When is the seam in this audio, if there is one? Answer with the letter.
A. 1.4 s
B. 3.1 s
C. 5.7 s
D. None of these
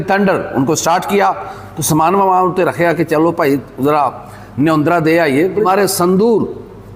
C